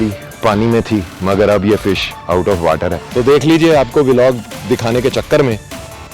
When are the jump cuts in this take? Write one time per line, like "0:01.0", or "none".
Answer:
0:03.0